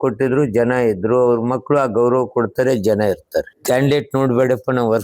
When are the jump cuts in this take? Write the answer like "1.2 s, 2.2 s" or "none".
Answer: 3.5 s